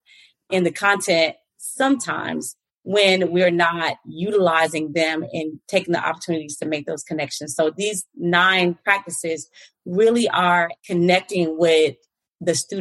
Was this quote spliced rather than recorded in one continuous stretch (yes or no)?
no